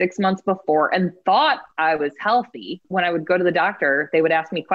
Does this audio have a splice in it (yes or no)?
yes